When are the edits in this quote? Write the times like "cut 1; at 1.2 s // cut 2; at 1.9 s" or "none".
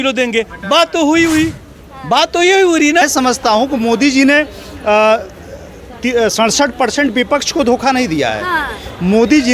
cut 1; at 3.0 s